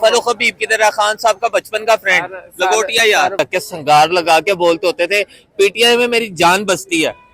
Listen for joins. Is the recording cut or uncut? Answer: cut